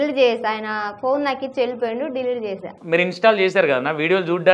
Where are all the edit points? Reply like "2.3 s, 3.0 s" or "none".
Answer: 2.7 s